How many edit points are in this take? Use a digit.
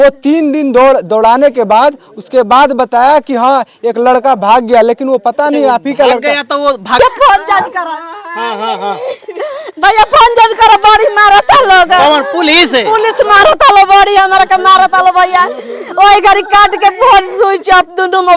1